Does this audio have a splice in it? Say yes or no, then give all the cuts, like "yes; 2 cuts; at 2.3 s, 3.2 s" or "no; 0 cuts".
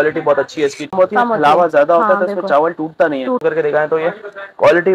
yes; 2 cuts; at 0.9 s, 3.4 s